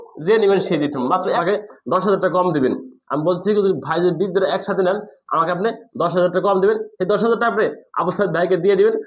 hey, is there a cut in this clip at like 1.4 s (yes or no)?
yes